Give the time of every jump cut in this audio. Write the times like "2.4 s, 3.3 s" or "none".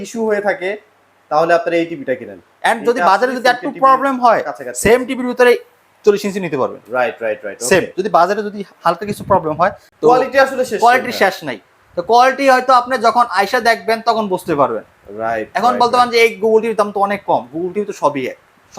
9.9 s